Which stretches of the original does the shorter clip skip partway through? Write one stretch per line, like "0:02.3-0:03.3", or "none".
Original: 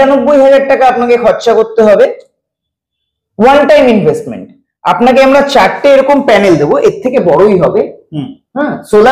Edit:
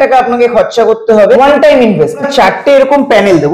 0:02.1-0:03.4
0:04.4-0:05.5